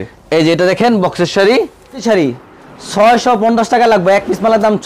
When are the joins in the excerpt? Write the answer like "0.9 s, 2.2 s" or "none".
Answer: 2.0 s